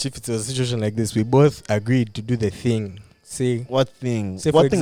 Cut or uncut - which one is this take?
uncut